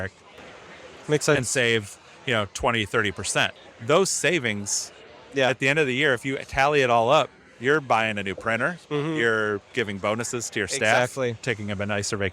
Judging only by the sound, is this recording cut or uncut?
cut